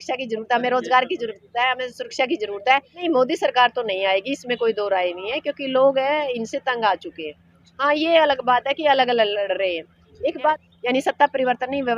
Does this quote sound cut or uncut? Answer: cut